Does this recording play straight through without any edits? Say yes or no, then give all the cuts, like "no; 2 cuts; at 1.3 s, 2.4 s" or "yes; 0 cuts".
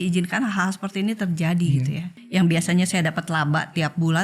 no; 1 cut; at 2.1 s